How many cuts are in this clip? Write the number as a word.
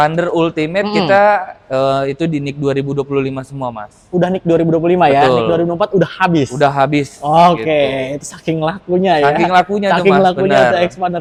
zero